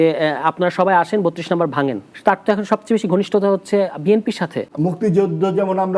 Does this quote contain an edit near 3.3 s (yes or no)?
no